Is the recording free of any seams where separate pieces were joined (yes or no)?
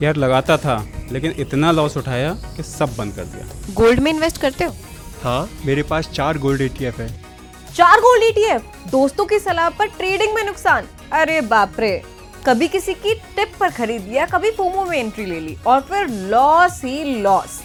yes